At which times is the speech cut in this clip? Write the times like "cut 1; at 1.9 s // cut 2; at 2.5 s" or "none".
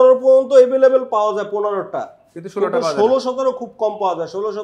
none